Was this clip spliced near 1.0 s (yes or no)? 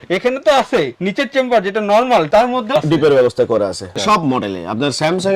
no